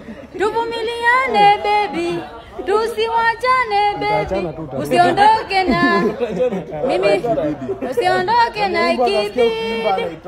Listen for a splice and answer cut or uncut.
uncut